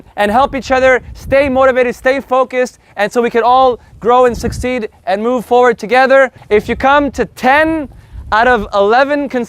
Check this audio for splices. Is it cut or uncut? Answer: cut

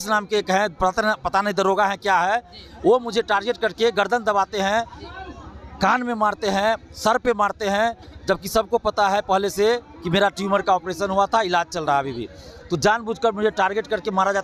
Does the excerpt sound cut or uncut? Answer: uncut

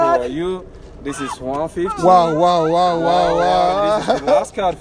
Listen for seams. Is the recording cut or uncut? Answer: uncut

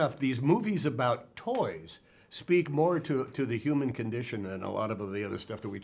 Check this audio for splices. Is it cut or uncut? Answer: uncut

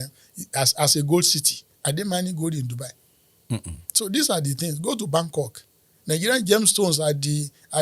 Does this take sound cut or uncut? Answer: uncut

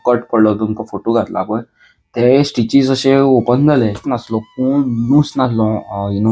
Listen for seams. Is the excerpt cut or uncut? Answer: cut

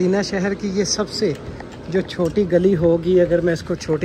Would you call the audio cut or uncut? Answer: uncut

